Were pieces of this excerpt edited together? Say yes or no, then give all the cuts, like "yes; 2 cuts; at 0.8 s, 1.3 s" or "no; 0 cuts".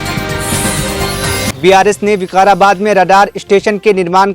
no; 0 cuts